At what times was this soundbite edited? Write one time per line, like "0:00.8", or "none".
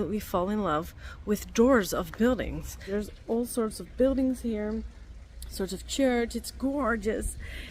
0:02.8